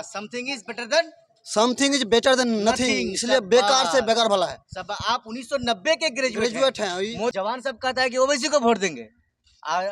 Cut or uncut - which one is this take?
cut